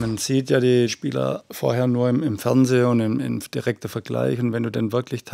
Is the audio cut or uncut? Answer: cut